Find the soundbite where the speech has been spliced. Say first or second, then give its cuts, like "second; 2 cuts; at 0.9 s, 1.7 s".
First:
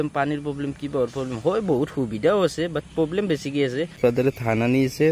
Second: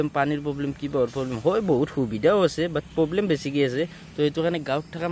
first; 1 cut; at 4.0 s